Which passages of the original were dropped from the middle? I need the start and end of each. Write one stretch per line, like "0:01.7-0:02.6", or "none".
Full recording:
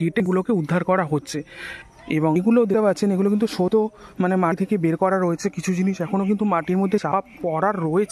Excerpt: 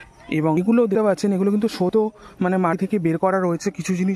none